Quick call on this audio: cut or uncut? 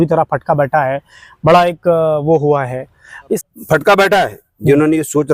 cut